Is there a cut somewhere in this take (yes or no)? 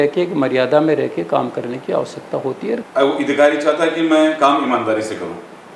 yes